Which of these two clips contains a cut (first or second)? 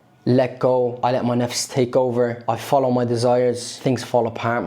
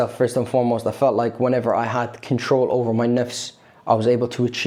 first